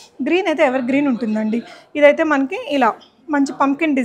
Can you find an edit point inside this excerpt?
no; 0 cuts

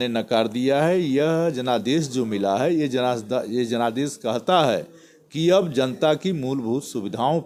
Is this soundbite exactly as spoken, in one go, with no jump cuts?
yes; 0 cuts

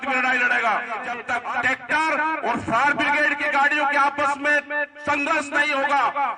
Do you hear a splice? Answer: yes; 1 cut; at 1.1 s

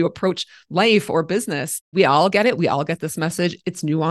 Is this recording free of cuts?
no; 1 cut; at 1.9 s

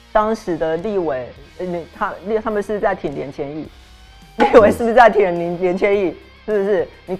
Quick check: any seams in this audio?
no; 0 cuts

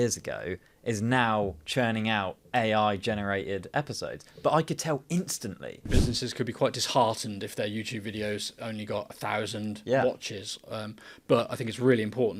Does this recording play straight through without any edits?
no; 1 cut; at 5.9 s

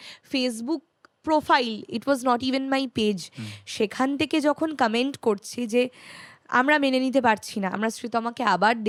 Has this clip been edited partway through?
no; 0 cuts

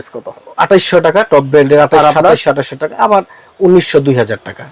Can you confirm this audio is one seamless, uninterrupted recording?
yes; 0 cuts

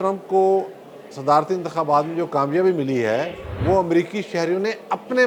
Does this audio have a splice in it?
no; 0 cuts

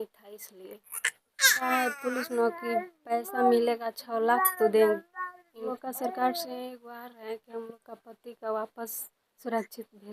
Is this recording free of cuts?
no; 2 cuts; at 1.7 s, 5.7 s

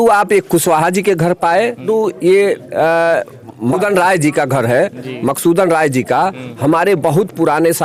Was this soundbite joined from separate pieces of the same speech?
no; 0 cuts

